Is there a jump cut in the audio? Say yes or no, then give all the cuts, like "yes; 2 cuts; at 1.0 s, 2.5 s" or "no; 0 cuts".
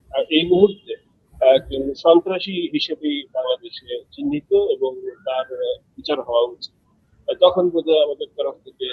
no; 0 cuts